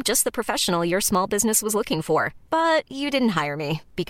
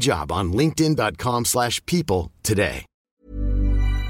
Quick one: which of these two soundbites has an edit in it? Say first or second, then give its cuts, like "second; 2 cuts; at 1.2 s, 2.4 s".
second; 1 cut; at 2.9 s